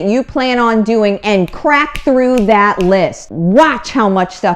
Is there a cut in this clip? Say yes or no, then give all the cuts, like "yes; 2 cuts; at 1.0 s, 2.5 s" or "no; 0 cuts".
yes; 1 cut; at 3.3 s